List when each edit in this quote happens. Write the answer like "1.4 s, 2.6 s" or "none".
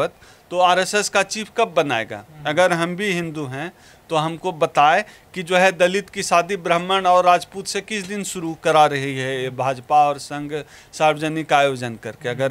none

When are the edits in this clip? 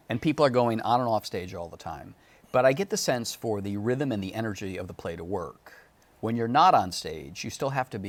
none

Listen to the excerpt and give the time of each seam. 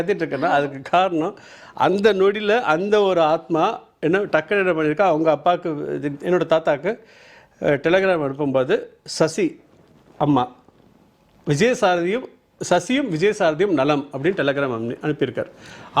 none

